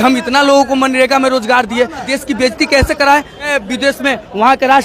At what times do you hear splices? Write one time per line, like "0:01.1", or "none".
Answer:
0:02.1
0:03.5